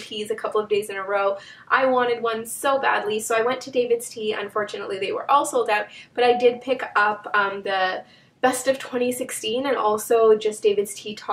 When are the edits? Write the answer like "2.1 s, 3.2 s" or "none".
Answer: 7.1 s